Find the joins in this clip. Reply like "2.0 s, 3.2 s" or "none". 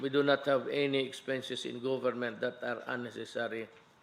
2.6 s